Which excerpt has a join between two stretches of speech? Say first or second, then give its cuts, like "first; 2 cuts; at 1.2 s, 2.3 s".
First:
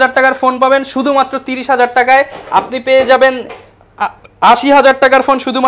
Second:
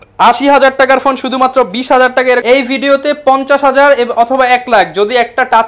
second; 1 cut; at 2.4 s